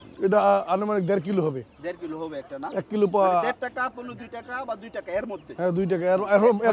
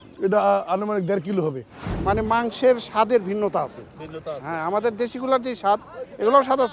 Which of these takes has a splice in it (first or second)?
second